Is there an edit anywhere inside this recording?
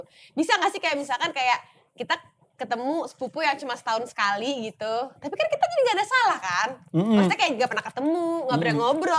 no; 0 cuts

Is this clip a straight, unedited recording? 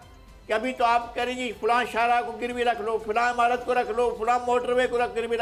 yes; 0 cuts

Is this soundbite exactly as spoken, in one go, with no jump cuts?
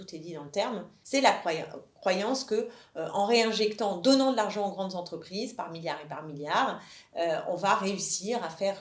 no; 1 cut; at 0.9 s

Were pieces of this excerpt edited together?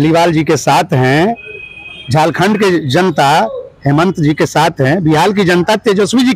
no; 0 cuts

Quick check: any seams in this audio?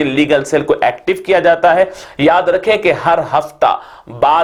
no; 0 cuts

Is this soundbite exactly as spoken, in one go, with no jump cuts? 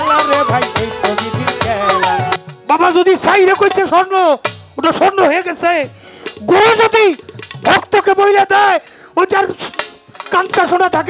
no; 1 cut; at 2.4 s

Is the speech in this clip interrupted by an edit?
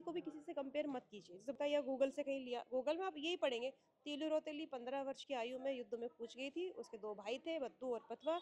yes; 1 cut; at 1.6 s

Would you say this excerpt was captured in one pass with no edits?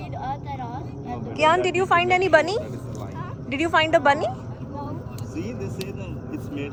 yes; 0 cuts

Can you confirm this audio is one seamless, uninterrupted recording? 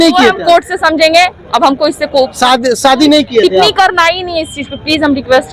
yes; 0 cuts

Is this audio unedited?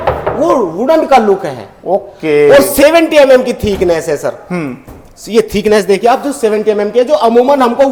yes; 0 cuts

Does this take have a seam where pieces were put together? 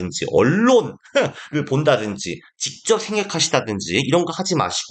no; 0 cuts

